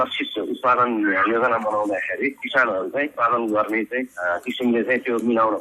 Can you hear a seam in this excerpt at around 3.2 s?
yes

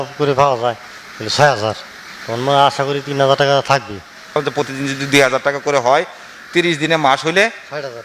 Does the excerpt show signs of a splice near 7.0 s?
no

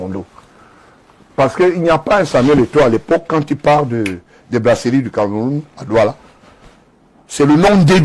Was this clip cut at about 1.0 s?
yes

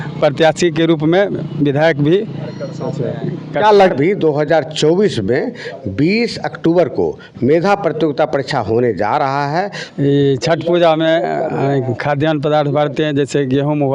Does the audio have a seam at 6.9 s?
no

